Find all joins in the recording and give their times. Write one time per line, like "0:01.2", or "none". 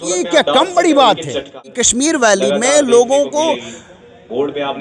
0:01.8